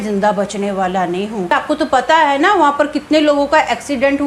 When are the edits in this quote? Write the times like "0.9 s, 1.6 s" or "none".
1.5 s